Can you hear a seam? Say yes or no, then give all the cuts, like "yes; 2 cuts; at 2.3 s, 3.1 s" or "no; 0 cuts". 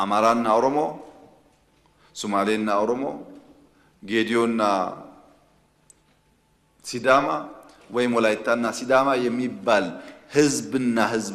no; 0 cuts